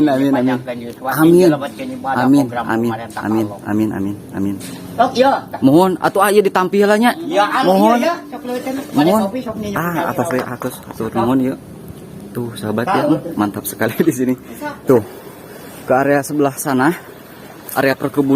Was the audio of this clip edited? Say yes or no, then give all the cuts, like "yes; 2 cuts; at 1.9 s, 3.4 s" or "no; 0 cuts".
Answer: yes; 1 cut; at 14.7 s